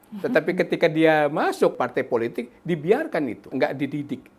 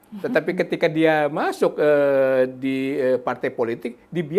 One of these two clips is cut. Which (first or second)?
first